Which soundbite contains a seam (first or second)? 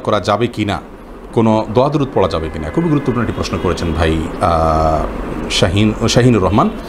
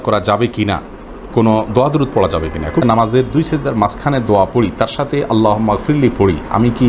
second